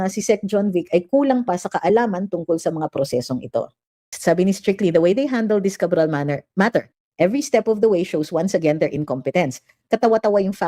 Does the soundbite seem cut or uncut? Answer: cut